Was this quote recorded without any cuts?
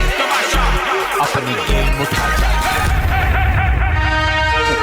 yes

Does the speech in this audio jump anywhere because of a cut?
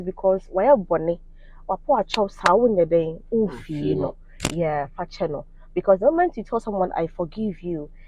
no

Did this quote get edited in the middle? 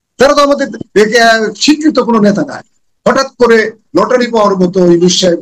no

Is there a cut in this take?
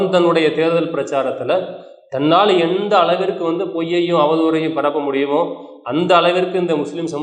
no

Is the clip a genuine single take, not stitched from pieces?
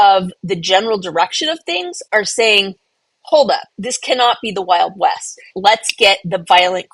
no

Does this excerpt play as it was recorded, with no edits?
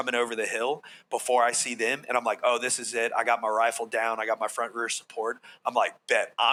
yes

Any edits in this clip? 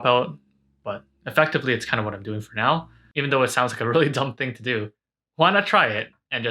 yes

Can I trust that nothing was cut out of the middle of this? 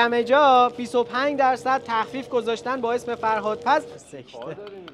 no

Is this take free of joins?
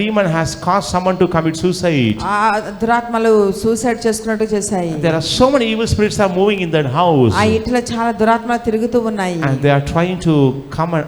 yes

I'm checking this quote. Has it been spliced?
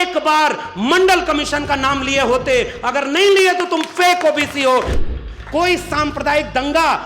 yes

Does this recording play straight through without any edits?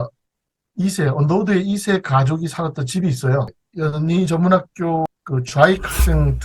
no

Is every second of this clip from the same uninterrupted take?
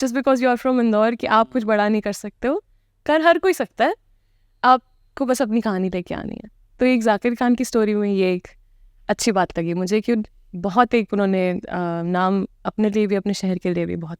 yes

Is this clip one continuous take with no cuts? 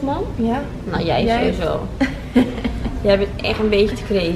yes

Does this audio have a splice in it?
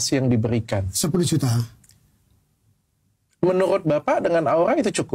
no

